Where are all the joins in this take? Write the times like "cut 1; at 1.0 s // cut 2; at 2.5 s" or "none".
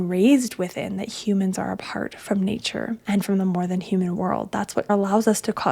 cut 1; at 3.0 s // cut 2; at 4.9 s